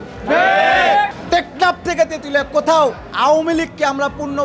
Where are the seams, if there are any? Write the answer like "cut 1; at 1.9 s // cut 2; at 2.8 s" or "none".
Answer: cut 1; at 1.2 s